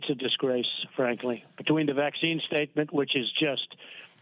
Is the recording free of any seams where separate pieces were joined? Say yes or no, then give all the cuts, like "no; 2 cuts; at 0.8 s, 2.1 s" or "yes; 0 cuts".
yes; 0 cuts